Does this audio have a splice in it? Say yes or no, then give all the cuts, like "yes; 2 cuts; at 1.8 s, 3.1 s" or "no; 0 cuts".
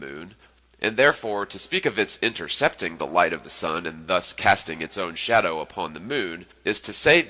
no; 0 cuts